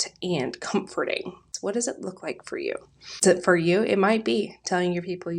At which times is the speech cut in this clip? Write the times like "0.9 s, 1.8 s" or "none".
1.5 s, 3.2 s